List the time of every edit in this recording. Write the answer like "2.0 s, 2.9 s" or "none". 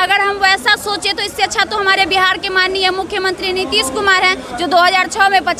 none